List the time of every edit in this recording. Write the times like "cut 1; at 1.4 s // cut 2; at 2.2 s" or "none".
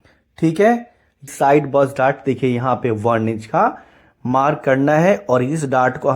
cut 1; at 1.3 s

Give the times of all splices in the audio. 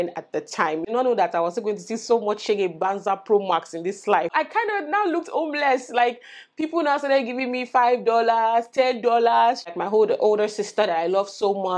cut 1; at 0.9 s // cut 2; at 4.3 s // cut 3; at 9.7 s

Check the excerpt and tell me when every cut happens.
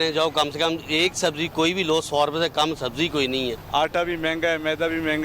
cut 1; at 3.6 s

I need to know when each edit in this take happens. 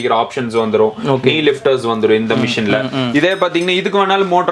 none

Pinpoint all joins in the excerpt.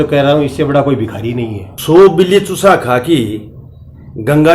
cut 1; at 1.6 s

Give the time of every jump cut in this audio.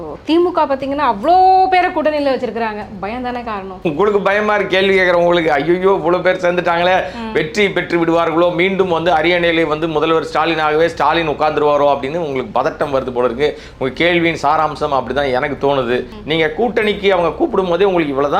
cut 1; at 3.7 s // cut 2; at 16.1 s

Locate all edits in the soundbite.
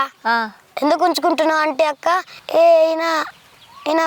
cut 1; at 2.3 s

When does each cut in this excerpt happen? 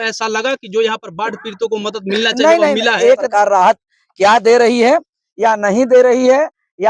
cut 1; at 3.3 s

